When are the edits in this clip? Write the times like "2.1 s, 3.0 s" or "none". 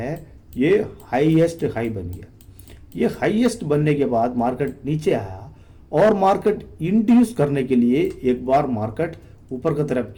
none